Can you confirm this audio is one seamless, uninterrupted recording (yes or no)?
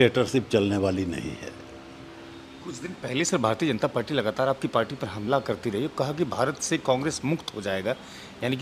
yes